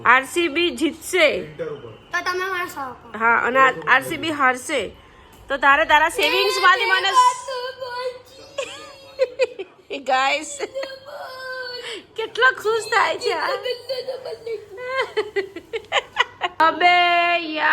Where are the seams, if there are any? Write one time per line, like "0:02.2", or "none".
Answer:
0:16.6